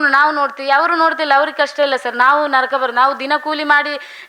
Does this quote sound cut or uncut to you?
uncut